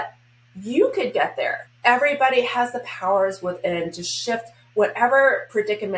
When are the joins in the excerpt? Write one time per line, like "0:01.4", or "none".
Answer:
0:01.6